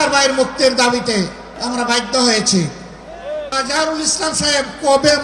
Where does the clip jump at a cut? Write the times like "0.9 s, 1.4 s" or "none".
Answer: 1.5 s, 3.5 s